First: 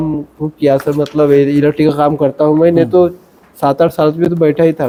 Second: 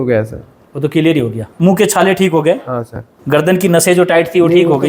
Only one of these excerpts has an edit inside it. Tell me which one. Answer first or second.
second